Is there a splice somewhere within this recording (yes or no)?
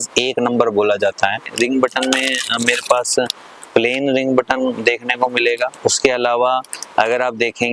yes